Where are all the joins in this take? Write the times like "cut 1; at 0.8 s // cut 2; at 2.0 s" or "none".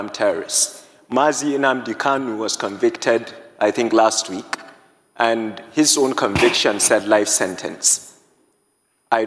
none